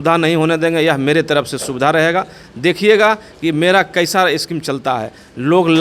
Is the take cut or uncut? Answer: uncut